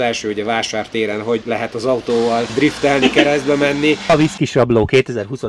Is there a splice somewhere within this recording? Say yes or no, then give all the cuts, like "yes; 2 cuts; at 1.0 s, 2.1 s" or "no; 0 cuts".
yes; 3 cuts; at 1.4 s, 2.5 s, 4.1 s